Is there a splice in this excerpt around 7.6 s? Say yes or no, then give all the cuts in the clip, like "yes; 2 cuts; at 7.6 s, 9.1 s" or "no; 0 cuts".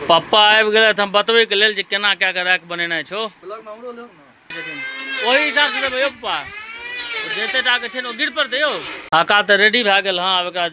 no; 2 cuts; at 4.5 s, 9.1 s